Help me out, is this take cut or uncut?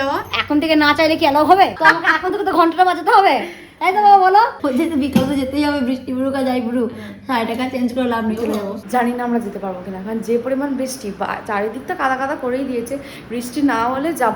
cut